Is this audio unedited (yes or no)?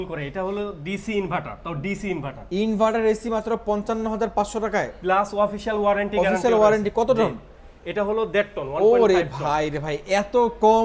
yes